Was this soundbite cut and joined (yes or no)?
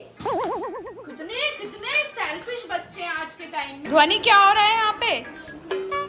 yes